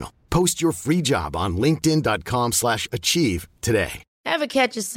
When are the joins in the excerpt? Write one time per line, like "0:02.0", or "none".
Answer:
0:04.1